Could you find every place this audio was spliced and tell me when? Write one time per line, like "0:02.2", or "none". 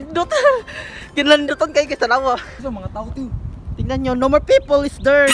0:02.5